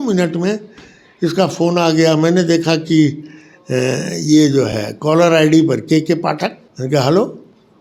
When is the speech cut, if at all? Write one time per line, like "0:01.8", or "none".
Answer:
0:06.7